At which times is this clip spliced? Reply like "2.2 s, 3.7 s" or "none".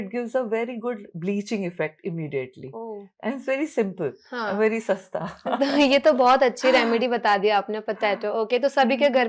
none